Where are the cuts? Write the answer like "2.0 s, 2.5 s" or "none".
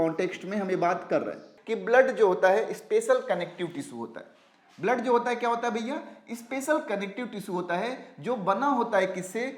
1.5 s